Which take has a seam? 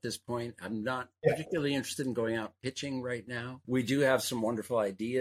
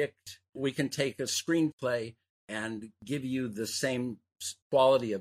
first; 1 cut; at 3.6 s

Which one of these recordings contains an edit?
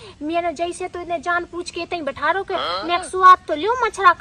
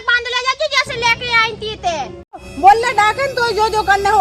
second; 1 cut; at 2.5 s

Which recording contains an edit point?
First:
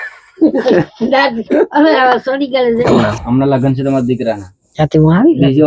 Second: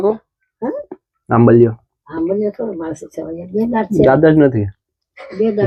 first; 1 cut; at 2.8 s

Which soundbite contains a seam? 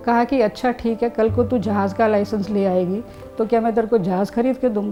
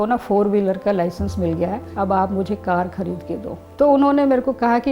second; 2 cuts; at 1.8 s, 3.6 s

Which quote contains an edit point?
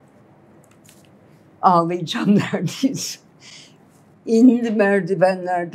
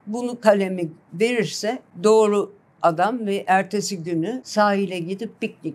second; 2 cuts; at 1.9 s, 4.4 s

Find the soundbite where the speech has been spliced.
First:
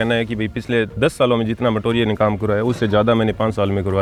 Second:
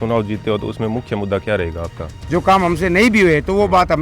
second; 1 cut; at 2.1 s

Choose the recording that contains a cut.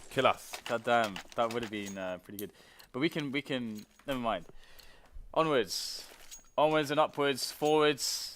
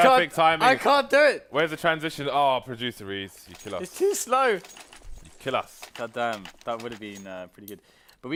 first; 1 cut; at 4.9 s

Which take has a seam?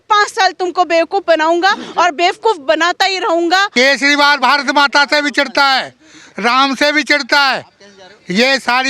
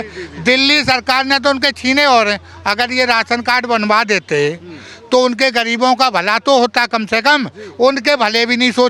first; 1 cut; at 3.7 s

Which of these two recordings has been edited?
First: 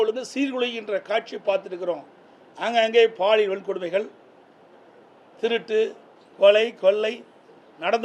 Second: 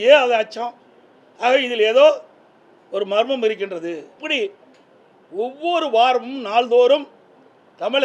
second; 1 cut; at 4.2 s

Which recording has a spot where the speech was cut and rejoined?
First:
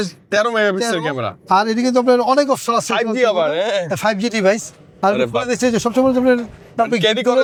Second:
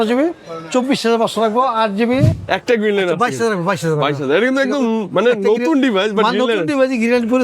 second; 1 cut; at 2.4 s

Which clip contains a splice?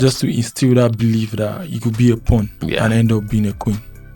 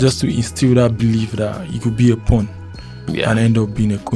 first; 1 cut; at 2.6 s

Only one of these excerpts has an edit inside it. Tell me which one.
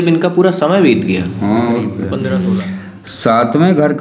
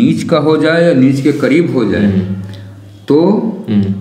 first; 1 cut; at 2.0 s

